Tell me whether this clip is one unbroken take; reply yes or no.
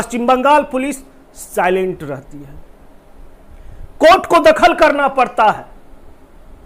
yes